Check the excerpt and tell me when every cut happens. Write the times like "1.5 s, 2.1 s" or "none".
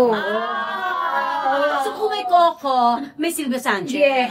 none